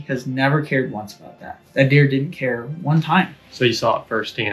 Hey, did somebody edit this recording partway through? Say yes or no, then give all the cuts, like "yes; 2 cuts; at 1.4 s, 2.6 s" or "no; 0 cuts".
yes; 1 cut; at 1.6 s